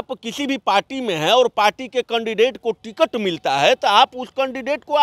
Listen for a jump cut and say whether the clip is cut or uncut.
uncut